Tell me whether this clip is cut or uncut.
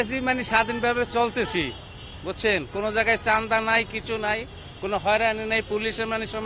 uncut